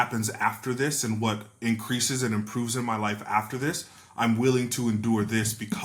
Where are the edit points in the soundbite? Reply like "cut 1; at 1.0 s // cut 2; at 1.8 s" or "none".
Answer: none